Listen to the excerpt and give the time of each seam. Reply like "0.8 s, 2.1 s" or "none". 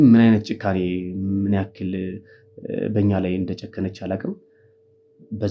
none